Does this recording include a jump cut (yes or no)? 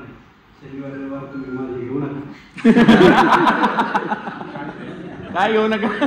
no